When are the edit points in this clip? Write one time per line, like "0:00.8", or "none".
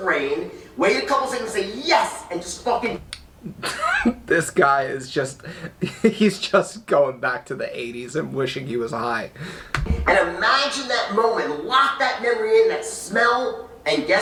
none